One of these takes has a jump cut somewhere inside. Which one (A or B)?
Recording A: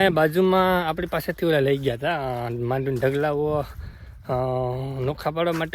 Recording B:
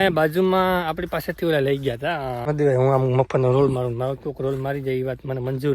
B